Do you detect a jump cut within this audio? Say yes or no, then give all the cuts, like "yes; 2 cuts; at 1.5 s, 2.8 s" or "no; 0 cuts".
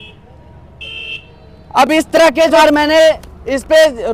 yes; 1 cut; at 2.6 s